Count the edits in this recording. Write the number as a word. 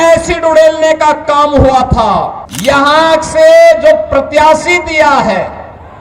one